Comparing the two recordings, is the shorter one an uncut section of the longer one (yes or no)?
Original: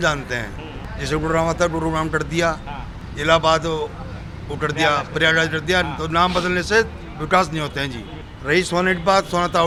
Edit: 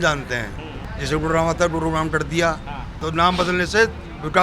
no